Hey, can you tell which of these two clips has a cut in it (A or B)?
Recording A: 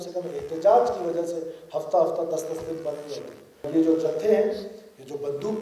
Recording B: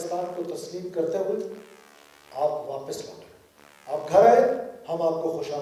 A